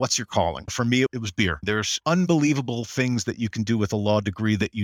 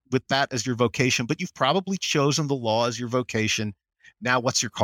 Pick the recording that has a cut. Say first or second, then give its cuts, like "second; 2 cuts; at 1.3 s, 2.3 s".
first; 1 cut; at 1.6 s